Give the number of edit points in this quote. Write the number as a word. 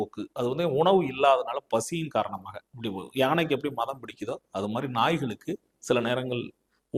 zero